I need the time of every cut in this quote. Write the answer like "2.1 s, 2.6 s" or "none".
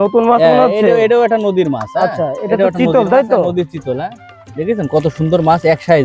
none

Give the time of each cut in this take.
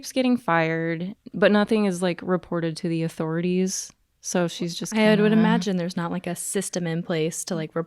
1.1 s

